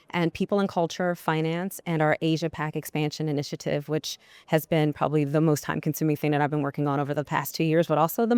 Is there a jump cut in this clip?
no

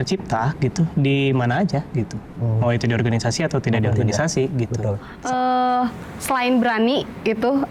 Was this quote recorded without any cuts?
no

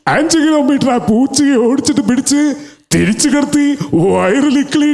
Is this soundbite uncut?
yes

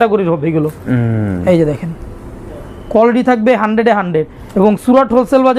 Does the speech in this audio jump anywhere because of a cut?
no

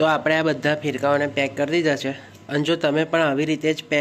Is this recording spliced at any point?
no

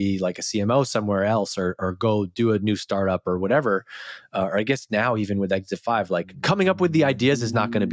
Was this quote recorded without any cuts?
no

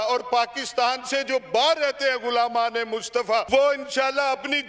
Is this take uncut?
no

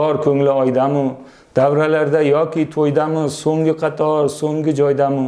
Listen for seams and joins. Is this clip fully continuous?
yes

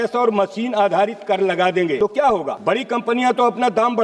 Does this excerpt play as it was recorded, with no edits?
no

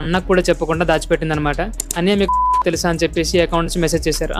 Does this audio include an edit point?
yes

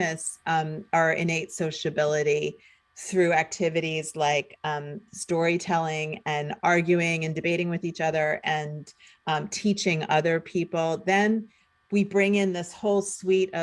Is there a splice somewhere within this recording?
no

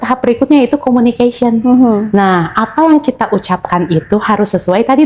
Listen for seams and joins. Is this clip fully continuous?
yes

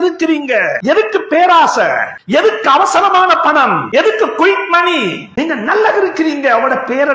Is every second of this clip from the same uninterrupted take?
no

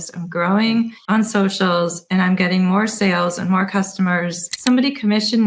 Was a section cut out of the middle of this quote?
yes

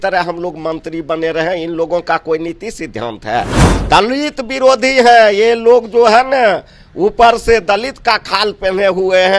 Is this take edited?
yes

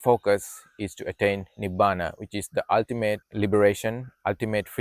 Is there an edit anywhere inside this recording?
yes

